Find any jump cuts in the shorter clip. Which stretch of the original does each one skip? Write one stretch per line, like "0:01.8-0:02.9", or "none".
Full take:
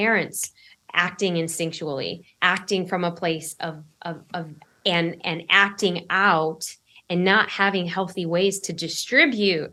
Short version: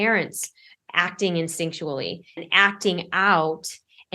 0:02.4-0:05.4